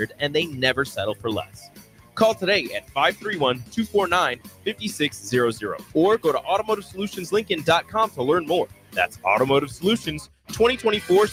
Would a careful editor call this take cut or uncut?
uncut